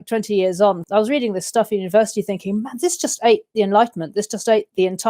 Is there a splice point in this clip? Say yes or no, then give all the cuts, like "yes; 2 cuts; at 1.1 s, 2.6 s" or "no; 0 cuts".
yes; 1 cut; at 3.5 s